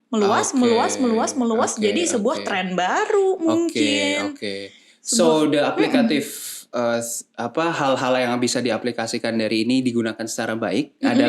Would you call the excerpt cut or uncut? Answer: uncut